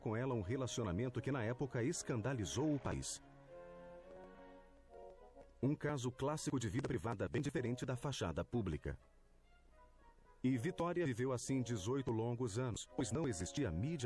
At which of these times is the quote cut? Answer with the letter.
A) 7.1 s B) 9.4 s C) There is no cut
A